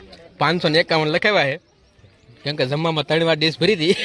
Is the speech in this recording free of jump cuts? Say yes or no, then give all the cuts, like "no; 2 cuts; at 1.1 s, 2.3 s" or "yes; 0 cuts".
yes; 0 cuts